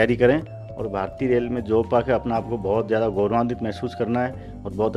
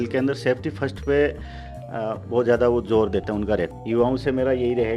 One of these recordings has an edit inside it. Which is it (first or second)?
second